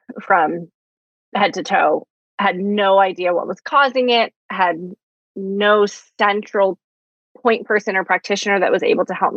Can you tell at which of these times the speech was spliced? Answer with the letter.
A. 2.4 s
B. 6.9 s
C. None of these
C